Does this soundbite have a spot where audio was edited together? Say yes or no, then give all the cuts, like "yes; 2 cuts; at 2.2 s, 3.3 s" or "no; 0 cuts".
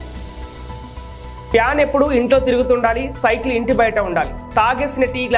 no; 0 cuts